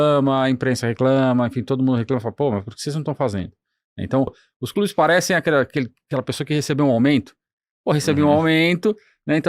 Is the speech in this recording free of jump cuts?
no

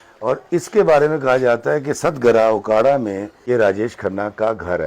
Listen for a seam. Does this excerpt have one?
yes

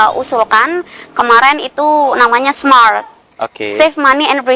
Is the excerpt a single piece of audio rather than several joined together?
yes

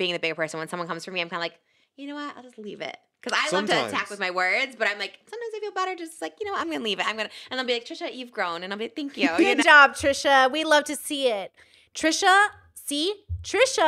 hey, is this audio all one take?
yes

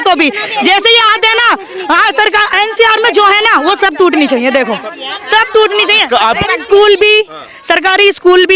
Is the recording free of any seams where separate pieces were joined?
yes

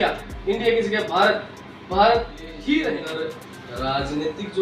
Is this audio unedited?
no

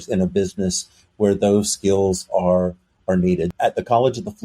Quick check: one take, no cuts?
no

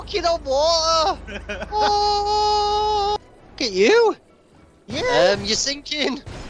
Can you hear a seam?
yes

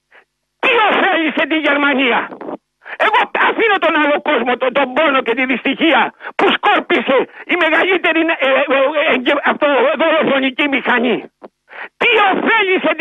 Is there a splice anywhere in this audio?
no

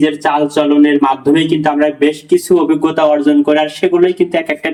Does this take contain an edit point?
no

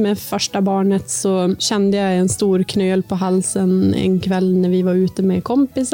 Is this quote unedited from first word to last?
no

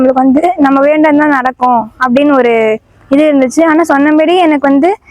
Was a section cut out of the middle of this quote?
no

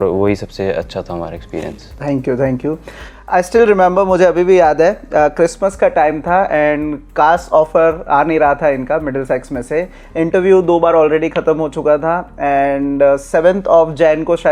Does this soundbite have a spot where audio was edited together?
no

